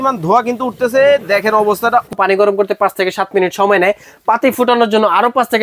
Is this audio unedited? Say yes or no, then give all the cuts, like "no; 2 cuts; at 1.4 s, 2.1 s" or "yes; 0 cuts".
no; 1 cut; at 2.1 s